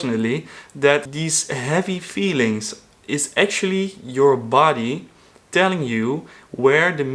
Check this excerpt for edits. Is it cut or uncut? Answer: cut